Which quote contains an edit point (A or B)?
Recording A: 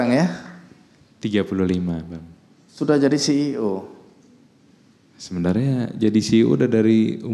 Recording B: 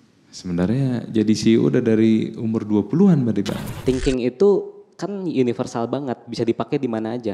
B